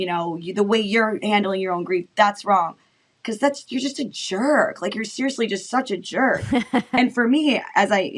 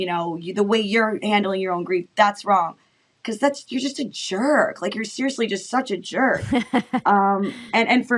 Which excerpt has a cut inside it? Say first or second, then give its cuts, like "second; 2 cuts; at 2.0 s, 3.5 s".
first; 1 cut; at 7.0 s